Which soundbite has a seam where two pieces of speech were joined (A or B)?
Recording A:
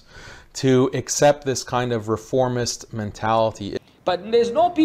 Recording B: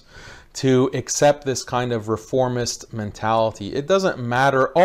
A